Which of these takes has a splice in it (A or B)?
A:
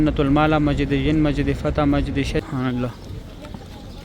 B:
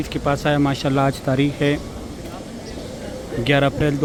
A